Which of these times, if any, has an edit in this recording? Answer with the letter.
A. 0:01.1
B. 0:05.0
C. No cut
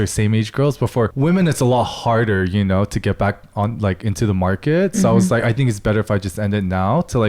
A